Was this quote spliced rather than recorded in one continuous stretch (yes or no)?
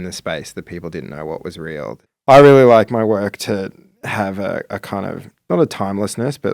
yes